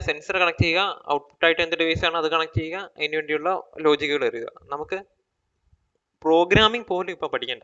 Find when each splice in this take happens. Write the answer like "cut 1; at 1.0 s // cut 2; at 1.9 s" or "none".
none